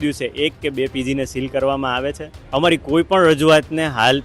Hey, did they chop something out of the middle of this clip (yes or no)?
yes